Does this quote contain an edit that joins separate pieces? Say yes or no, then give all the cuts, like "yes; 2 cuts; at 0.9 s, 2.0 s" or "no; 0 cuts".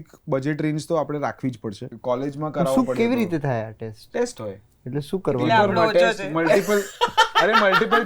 yes; 1 cut; at 1.9 s